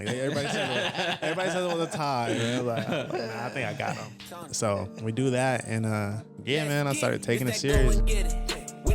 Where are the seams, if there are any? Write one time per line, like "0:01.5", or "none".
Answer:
0:07.9